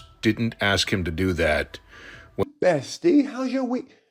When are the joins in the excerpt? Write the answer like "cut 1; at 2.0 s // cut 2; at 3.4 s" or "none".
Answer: cut 1; at 2.4 s